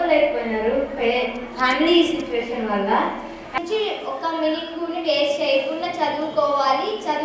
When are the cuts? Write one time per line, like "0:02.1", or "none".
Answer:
0:03.5